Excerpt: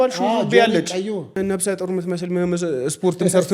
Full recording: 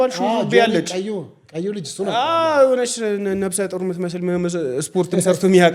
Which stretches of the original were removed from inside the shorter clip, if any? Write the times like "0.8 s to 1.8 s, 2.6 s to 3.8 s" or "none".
1.4 s to 3.3 s